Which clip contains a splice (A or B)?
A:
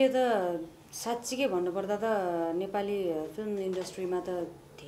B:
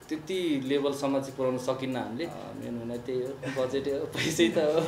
B